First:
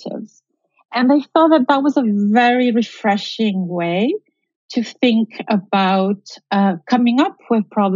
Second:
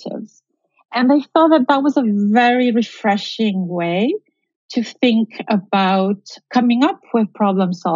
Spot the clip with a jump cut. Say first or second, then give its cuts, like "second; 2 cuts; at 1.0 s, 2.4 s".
second; 1 cut; at 6.4 s